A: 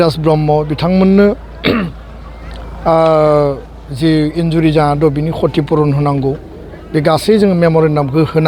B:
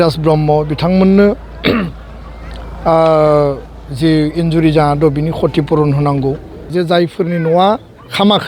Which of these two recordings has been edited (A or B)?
B